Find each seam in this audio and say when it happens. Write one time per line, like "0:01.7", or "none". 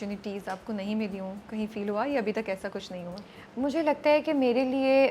none